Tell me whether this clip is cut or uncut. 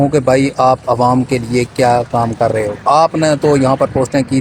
uncut